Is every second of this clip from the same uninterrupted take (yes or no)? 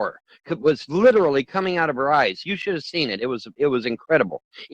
yes